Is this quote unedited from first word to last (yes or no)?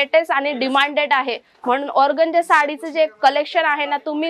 yes